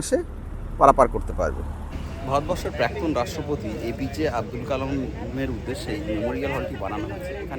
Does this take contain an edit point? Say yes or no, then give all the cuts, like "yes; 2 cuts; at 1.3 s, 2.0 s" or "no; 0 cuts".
yes; 1 cut; at 2.2 s